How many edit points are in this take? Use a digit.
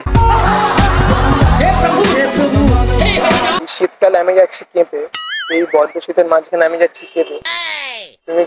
1